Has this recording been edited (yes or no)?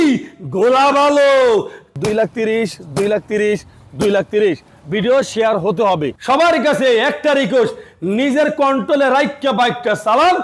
yes